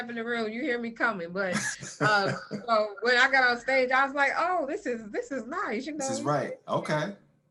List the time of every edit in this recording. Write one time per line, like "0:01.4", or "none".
none